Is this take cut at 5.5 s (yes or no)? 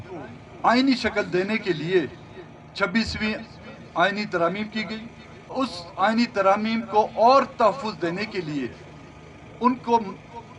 yes